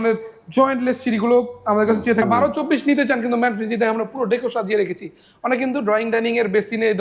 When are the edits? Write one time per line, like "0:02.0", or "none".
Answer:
0:02.2